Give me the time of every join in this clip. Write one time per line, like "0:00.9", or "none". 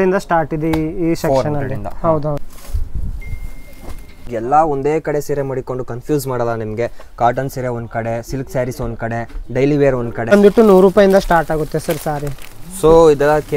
0:02.5
0:04.3
0:10.3